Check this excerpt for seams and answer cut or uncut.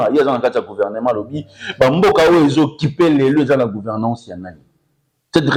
uncut